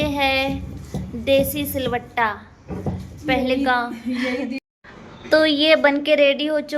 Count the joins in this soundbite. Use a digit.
1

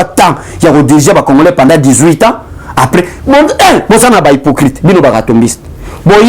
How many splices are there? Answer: 0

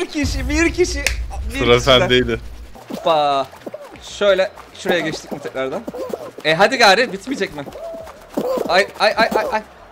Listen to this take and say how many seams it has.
1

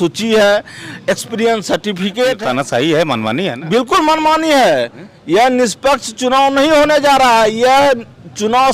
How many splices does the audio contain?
1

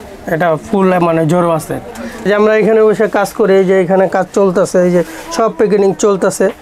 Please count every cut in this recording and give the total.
1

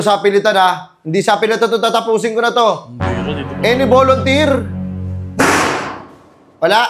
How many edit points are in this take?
0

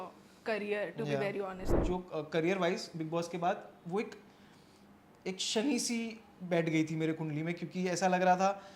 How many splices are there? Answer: 1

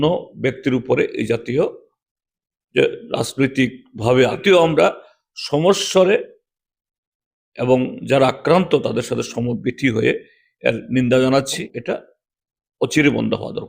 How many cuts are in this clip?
2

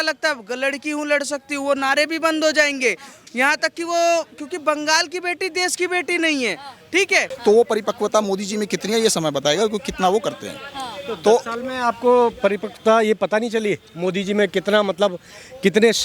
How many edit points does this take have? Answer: 1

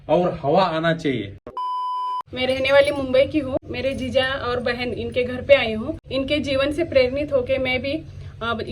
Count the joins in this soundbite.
3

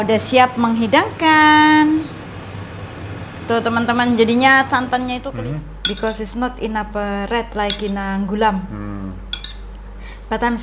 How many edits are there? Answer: 1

